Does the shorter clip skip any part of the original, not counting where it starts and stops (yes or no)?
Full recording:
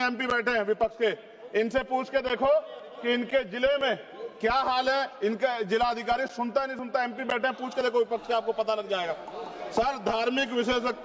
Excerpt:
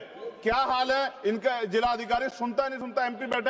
no